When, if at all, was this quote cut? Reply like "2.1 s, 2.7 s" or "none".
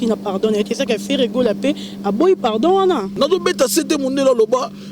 3.1 s